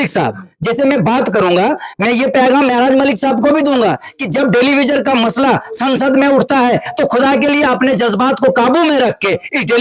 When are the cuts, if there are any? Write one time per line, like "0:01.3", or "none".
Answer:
none

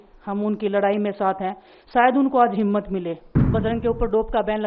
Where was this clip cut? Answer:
0:03.3

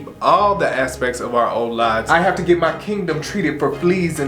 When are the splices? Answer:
0:02.0

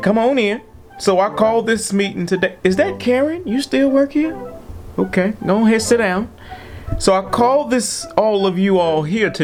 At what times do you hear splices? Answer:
none

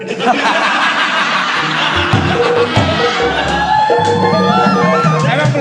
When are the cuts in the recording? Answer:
none

